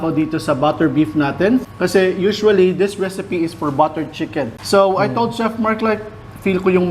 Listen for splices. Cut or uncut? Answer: cut